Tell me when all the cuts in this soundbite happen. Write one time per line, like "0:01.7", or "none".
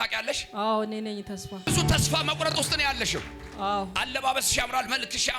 0:01.7

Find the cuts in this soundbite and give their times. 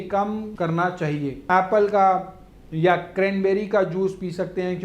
0:01.4

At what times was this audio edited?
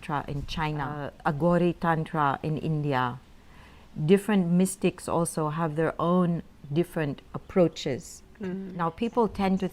0:01.1
0:08.7

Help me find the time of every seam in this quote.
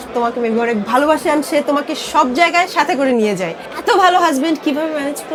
none

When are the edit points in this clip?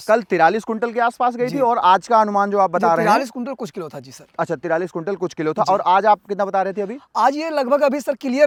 none

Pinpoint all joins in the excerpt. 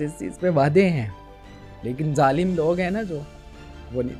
none

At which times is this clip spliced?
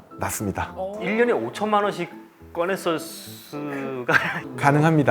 0:00.9

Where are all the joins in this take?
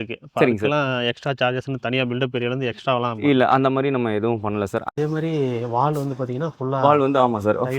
0:04.8

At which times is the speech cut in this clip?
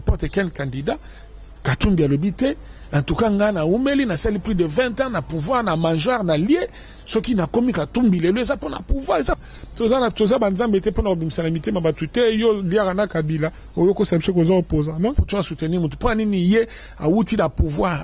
0:09.5
0:15.2

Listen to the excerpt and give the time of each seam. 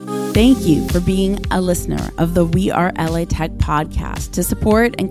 none

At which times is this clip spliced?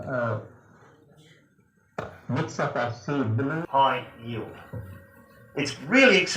0:03.6

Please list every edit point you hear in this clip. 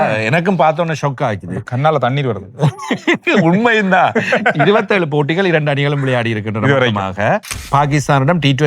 0:07.6

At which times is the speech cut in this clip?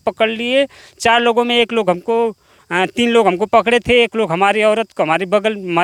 none

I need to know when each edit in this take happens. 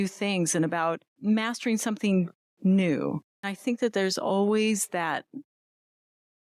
0:01.1
0:03.5

